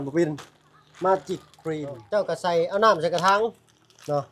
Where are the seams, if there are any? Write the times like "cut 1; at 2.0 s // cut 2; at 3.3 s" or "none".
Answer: cut 1; at 2.0 s